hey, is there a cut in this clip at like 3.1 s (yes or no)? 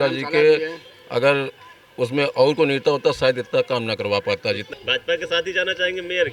no